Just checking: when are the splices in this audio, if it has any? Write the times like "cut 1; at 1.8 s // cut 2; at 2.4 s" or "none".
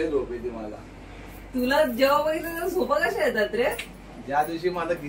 none